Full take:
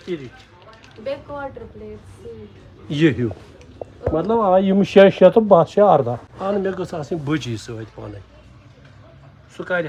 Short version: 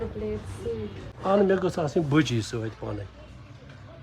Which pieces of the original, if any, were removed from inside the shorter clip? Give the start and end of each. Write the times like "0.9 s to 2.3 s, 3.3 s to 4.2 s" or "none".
2.7 s to 6.3 s

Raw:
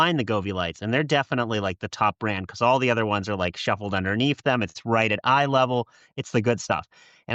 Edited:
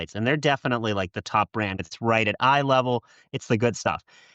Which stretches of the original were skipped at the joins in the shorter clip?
2.5 s to 4.7 s

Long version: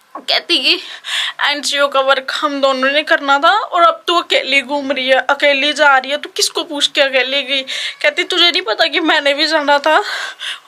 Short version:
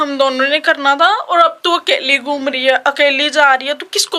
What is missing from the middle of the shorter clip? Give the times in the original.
none

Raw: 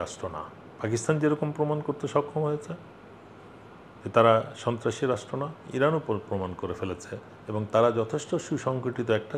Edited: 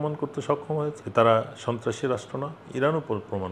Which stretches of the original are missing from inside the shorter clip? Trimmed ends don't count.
2.7 s to 4.0 s

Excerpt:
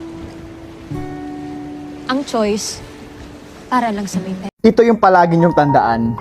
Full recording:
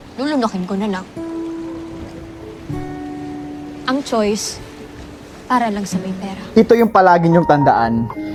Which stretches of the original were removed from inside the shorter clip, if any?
6.3 s to 6.4 s

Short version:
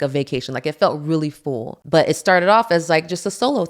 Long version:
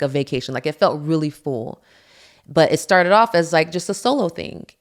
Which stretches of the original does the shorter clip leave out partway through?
1.7 s to 2.4 s

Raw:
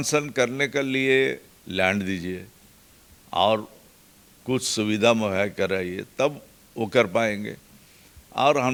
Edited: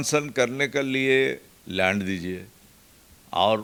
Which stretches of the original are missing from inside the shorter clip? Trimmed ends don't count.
none

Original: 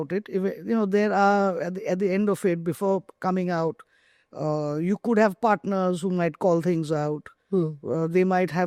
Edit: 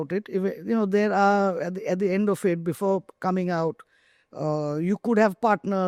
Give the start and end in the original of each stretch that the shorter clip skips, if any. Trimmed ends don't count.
none

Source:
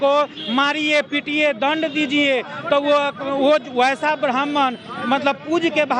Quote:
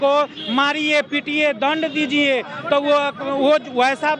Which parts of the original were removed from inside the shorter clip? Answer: none

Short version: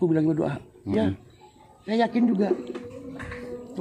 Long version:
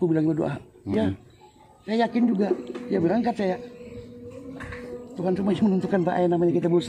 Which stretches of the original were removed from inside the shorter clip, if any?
2.7 s to 4.1 s

